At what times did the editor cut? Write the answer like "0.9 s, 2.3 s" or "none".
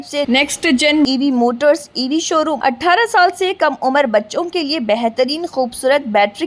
2.6 s

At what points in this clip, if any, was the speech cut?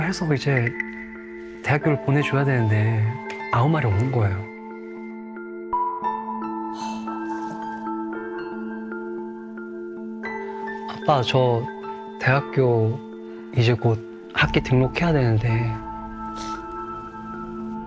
none

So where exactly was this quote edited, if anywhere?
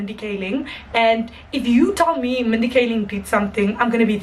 none

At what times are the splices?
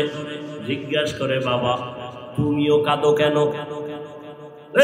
none

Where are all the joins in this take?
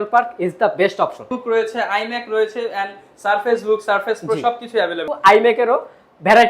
1.3 s, 5.0 s

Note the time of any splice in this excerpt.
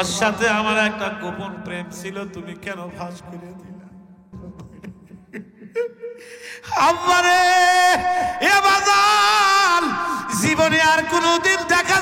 4.3 s

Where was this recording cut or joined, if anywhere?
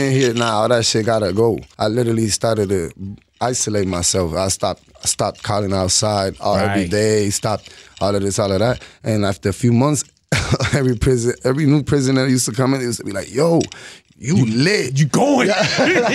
1.7 s

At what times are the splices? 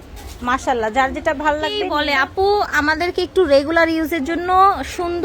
1.9 s

